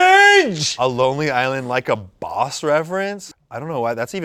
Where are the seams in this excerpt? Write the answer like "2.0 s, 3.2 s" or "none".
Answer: 3.2 s